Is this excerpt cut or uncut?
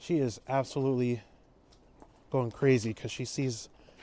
uncut